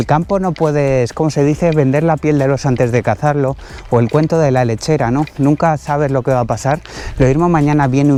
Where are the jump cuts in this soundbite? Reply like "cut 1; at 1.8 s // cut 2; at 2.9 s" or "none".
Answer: none

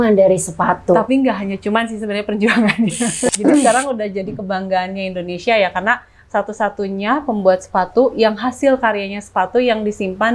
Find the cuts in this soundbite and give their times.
cut 1; at 3.3 s

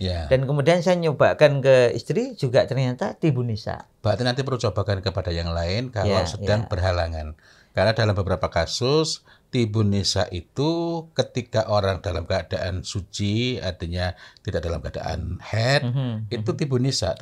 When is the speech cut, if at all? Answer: none

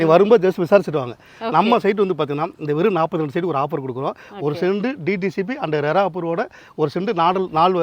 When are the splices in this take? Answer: none

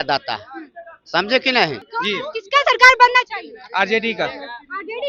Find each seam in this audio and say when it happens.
cut 1; at 1.9 s

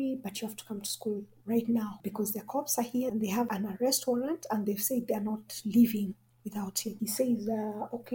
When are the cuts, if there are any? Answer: cut 1; at 2.0 s // cut 2; at 3.2 s // cut 3; at 7.0 s

